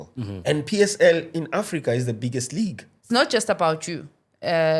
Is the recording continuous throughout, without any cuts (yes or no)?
no